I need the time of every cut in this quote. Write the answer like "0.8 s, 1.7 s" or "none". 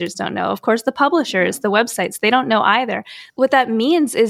3.2 s